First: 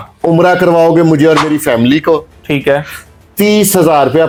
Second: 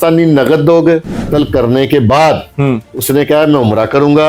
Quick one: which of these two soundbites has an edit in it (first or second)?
second